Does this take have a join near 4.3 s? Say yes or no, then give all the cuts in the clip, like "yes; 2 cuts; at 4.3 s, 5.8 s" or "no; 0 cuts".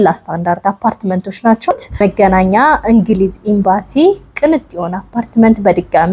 no; 1 cut; at 1.7 s